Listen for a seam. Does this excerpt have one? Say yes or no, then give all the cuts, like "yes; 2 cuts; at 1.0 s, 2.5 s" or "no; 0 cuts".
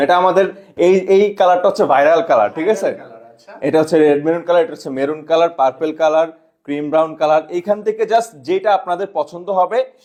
no; 0 cuts